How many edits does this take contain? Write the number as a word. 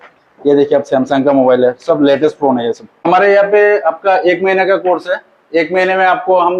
one